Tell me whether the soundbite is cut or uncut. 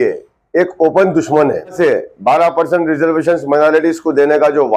cut